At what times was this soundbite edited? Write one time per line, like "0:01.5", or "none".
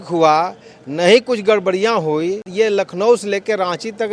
0:02.4

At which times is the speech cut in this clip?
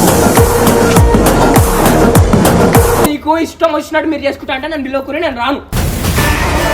0:03.1

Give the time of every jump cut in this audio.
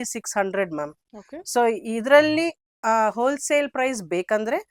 none

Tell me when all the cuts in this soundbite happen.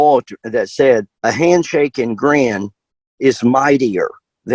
0:01.1

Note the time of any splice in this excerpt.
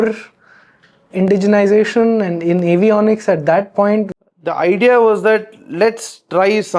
0:04.1

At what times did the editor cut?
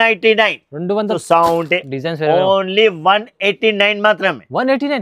0:01.2

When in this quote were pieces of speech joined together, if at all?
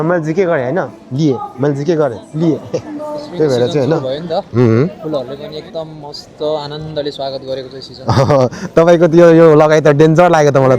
0:04.0

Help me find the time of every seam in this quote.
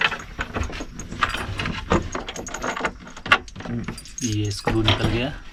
none

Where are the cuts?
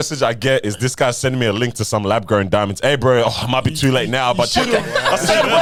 none

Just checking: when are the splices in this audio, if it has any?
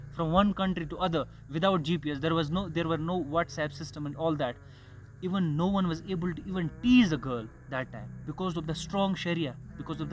none

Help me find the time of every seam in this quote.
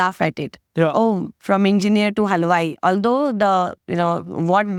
none

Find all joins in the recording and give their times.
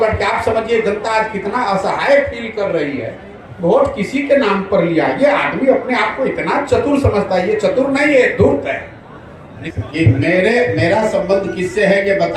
0:09.5

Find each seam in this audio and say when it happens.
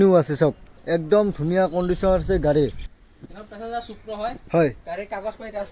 none

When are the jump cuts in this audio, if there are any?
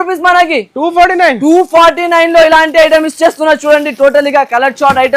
none

